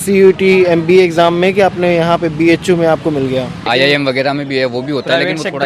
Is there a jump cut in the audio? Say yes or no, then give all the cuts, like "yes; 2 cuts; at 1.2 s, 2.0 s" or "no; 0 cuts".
yes; 1 cut; at 3.6 s